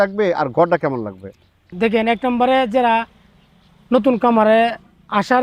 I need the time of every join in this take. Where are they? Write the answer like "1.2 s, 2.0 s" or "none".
1.7 s